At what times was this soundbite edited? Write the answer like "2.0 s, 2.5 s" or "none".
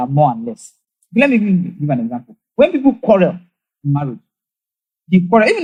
none